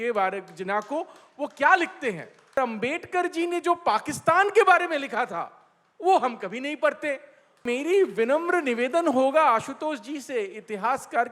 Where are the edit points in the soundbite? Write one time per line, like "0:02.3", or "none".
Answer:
0:02.6
0:07.6